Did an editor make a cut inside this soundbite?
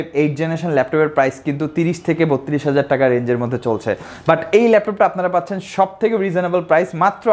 no; 0 cuts

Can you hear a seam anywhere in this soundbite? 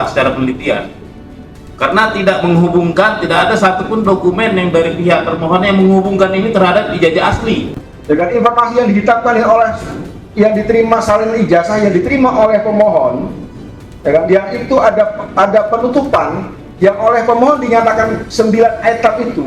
yes; 1 cut; at 7.9 s

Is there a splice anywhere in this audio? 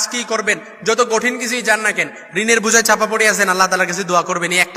no; 0 cuts

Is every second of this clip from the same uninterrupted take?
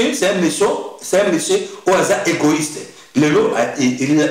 yes; 0 cuts

